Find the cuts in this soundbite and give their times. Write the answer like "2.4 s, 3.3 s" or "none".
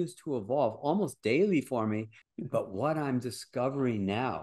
2.2 s